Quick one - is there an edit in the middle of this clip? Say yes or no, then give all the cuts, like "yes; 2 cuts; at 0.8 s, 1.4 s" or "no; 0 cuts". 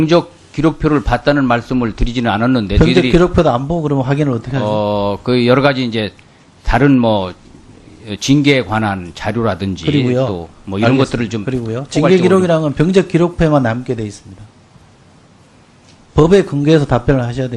no; 0 cuts